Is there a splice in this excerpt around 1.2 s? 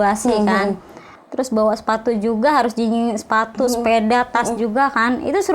yes; 1 cut; at 1.2 s

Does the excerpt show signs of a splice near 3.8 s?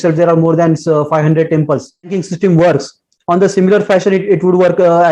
no; 1 cut; at 2.2 s

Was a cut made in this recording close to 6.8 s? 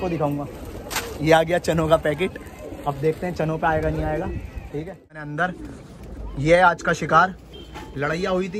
no; 1 cut; at 5.3 s

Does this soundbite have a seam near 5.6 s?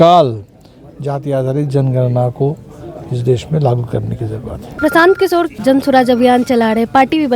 yes; 2 cuts; at 4.7 s, 5.6 s

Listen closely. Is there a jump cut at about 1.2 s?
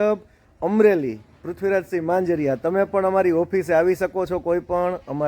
no; 0 cuts

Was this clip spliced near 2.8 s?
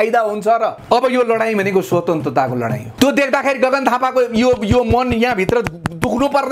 yes; 2 cuts; at 0.8 s, 2.8 s

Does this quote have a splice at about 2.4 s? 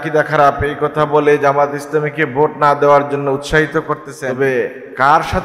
no; 1 cut; at 4.2 s

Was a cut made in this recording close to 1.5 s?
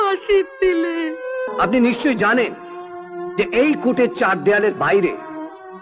yes; 1 cut; at 1.5 s

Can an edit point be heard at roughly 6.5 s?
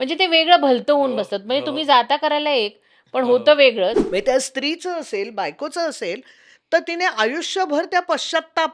no; 1 cut; at 4.0 s

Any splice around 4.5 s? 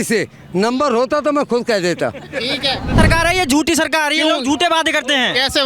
no; 1 cut; at 3.0 s

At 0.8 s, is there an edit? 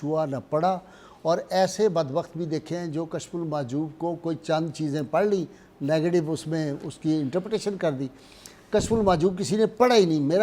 no; 0 cuts

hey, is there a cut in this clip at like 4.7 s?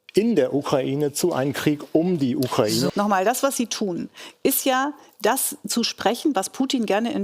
no; 1 cut; at 2.9 s

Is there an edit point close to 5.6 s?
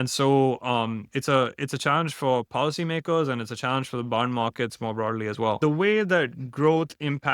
yes; 1 cut; at 5.6 s

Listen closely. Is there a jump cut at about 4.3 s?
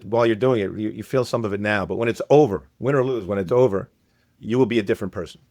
yes; 1 cut; at 4.3 s

